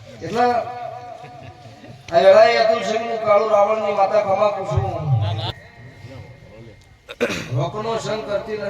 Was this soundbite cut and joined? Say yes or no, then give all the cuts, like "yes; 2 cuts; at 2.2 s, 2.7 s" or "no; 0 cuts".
yes; 1 cut; at 5.5 s